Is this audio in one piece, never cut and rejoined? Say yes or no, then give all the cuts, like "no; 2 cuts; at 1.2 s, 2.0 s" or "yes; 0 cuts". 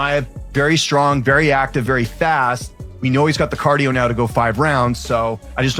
yes; 0 cuts